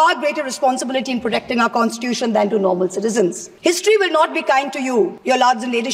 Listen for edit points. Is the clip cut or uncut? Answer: cut